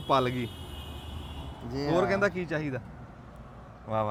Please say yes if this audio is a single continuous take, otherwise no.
yes